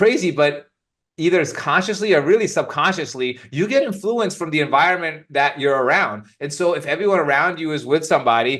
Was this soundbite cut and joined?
no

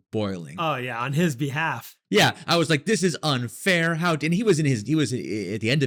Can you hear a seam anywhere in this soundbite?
no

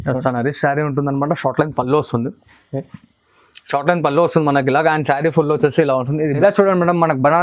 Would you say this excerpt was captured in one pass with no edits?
no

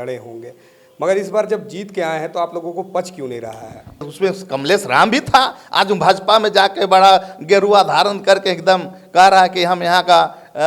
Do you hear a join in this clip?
yes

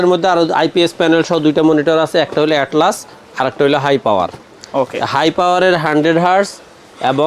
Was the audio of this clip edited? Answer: no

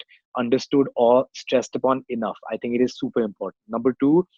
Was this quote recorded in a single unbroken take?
yes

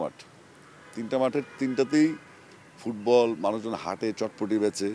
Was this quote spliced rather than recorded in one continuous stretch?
no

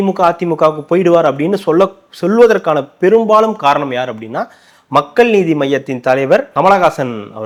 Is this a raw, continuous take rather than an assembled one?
yes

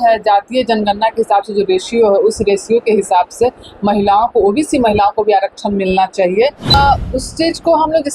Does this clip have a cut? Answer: yes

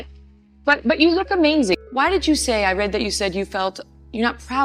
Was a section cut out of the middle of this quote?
no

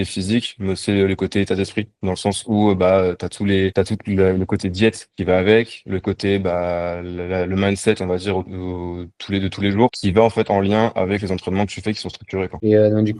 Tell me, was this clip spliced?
no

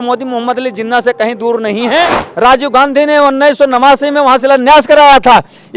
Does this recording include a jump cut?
yes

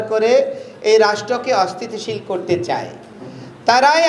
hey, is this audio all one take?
yes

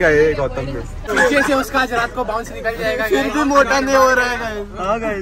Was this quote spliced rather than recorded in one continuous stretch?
no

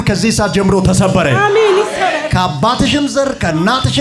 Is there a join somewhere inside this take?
no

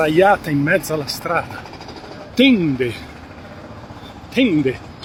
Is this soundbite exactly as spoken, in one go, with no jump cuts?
yes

